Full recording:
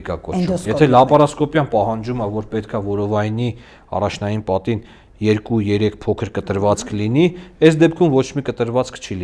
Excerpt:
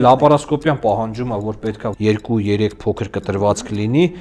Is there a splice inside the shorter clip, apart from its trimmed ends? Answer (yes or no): yes